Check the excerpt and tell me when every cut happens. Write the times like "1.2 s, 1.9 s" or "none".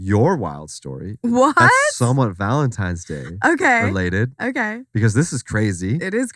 none